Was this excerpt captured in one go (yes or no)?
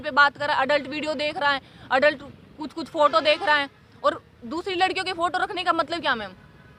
yes